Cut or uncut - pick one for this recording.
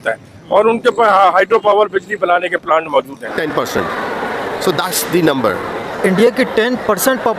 cut